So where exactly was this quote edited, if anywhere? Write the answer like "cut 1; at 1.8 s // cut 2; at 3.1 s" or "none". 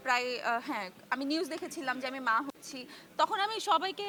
none